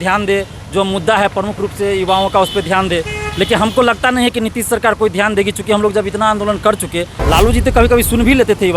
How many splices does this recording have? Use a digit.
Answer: 1